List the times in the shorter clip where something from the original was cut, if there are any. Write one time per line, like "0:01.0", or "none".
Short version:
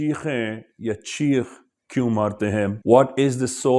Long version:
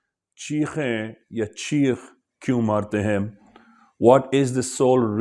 0:02.8